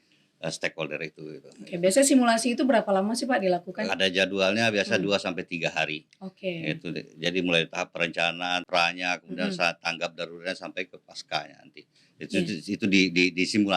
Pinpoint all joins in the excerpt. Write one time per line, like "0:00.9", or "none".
0:03.7
0:08.6

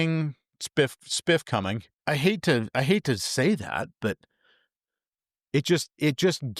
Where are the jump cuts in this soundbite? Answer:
0:01.9

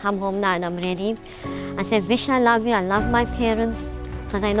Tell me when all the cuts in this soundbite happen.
none

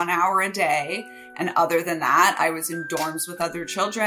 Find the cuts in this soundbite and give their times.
none

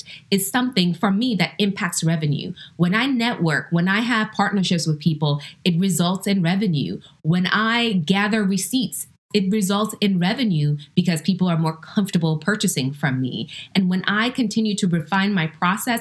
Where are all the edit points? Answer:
0:09.3

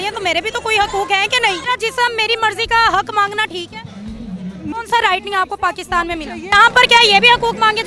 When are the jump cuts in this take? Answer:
0:01.6
0:04.7
0:06.4

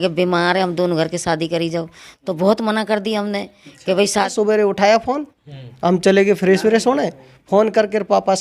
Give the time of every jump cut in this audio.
0:04.3

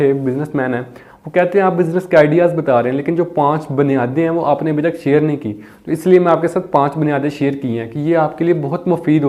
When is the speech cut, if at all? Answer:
none

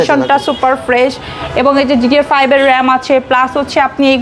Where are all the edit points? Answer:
none

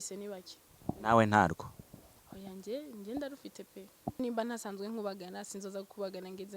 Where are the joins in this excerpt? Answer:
0:04.2

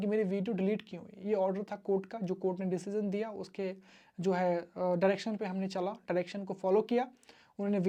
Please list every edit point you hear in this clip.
none

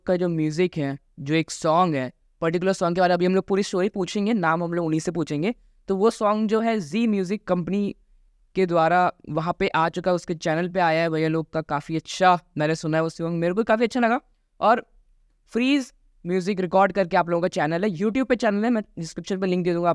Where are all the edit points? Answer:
none

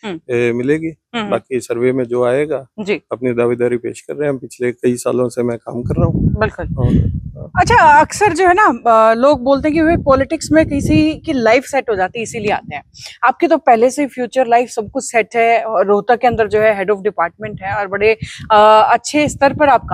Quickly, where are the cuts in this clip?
none

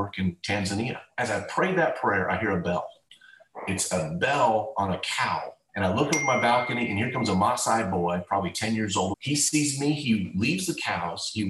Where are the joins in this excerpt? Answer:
0:01.0
0:05.6
0:09.2

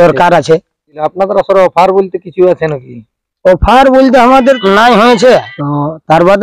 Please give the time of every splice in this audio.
none

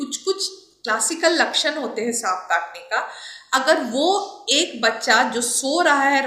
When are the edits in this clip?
none

